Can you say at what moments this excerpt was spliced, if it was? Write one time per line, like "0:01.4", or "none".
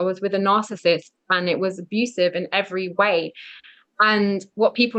none